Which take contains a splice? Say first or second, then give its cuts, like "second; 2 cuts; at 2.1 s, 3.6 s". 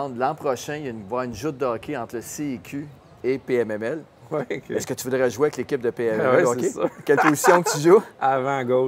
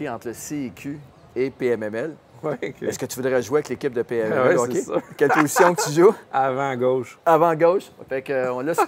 second; 1 cut; at 8.0 s